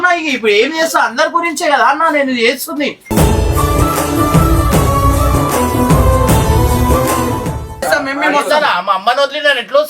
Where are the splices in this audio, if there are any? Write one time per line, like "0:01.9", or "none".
0:07.8